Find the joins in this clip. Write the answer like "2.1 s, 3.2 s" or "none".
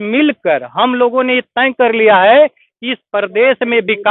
none